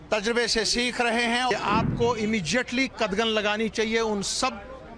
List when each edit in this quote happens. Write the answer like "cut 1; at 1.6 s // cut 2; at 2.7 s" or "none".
cut 1; at 1.5 s